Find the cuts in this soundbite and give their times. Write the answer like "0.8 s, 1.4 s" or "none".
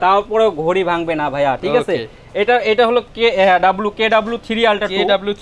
none